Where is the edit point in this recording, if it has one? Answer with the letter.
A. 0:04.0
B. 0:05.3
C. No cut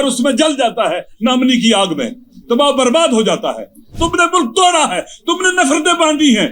A